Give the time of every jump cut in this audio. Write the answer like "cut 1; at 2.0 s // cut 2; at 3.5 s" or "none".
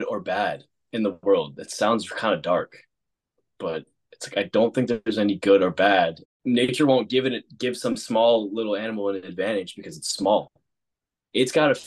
cut 1; at 6.3 s